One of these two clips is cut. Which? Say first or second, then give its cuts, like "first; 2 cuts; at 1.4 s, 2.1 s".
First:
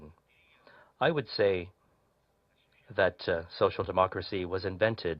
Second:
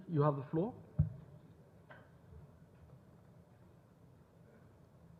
first; 1 cut; at 3.5 s